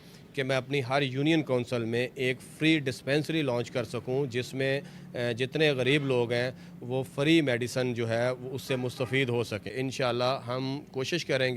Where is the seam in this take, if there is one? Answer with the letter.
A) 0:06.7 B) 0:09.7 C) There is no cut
B